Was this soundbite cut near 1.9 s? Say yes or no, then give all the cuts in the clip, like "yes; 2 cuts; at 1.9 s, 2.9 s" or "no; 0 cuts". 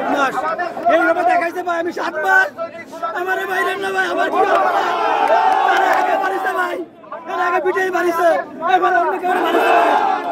no; 0 cuts